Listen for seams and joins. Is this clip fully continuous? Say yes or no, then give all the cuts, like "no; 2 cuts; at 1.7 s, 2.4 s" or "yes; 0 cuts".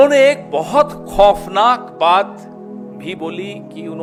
yes; 0 cuts